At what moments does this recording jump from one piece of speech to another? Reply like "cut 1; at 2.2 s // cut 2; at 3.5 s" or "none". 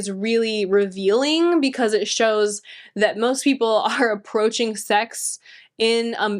none